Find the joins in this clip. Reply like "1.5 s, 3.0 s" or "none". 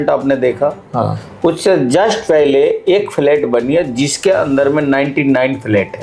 none